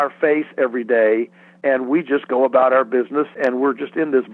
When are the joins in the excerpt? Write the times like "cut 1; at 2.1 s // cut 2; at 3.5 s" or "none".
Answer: cut 1; at 3.3 s

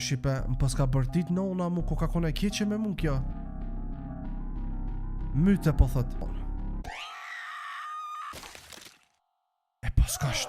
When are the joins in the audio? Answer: cut 1; at 6.2 s

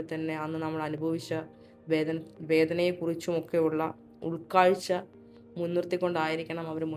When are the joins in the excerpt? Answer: none

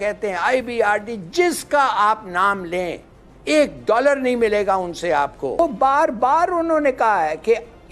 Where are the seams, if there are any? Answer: cut 1; at 5.6 s

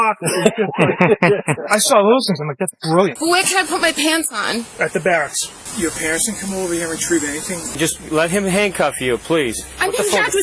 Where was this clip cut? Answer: cut 1; at 3.2 s // cut 2; at 5.7 s // cut 3; at 7.7 s

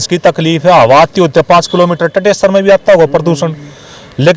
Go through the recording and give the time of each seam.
none

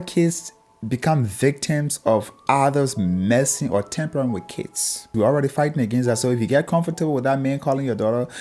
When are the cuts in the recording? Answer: cut 1; at 5.1 s

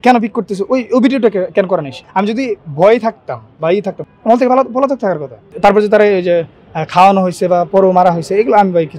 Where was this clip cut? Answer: cut 1; at 2.0 s // cut 2; at 4.0 s // cut 3; at 5.4 s

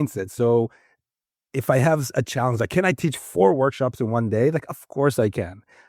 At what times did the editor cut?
none

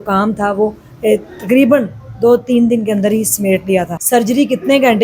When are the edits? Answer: cut 1; at 4.0 s

